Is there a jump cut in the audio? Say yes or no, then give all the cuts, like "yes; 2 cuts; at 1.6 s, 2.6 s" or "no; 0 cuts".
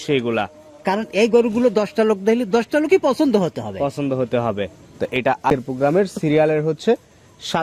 no; 0 cuts